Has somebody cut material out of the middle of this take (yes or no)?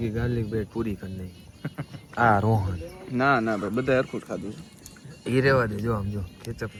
no